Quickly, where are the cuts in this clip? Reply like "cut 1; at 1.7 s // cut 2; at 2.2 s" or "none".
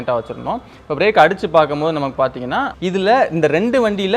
cut 1; at 2.7 s